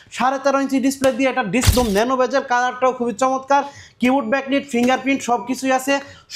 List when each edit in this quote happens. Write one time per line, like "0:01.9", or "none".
0:01.7